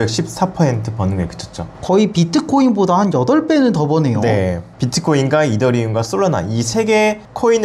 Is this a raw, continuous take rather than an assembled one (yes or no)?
no